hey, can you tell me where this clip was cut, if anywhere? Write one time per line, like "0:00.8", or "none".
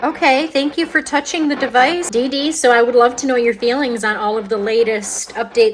0:02.1